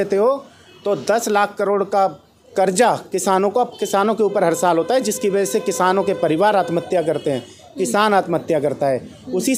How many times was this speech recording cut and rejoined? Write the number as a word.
zero